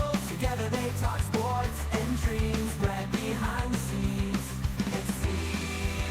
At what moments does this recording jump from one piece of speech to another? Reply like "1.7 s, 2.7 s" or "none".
none